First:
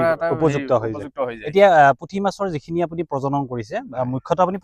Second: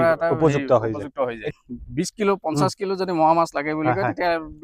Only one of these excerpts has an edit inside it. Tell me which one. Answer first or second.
second